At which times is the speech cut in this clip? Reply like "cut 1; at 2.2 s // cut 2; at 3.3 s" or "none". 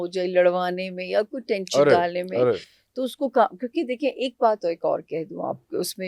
none

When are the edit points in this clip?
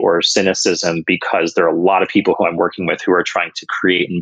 none

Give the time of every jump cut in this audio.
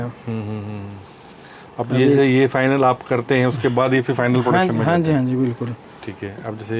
none

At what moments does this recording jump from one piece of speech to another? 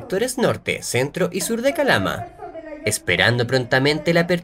cut 1; at 2.5 s

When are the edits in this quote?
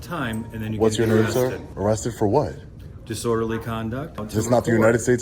cut 1; at 1.7 s // cut 2; at 4.2 s

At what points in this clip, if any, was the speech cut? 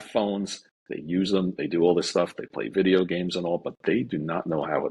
none

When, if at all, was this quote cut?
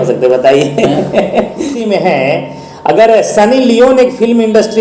cut 1; at 1.7 s

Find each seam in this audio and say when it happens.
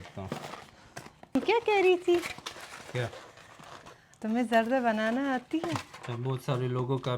cut 1; at 1.4 s // cut 2; at 6.0 s

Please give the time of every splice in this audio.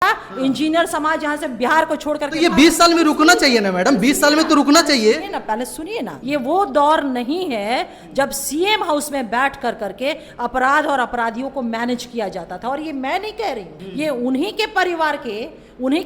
cut 1; at 6.1 s // cut 2; at 13.8 s

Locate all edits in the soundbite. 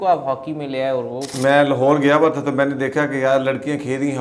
cut 1; at 1.3 s

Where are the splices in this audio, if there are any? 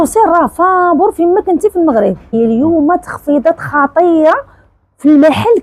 cut 1; at 2.3 s

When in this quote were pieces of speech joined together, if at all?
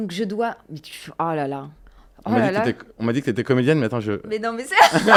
none

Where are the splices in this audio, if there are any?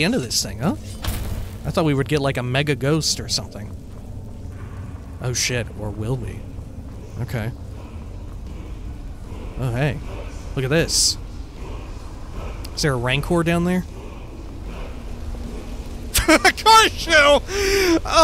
cut 1; at 16.1 s

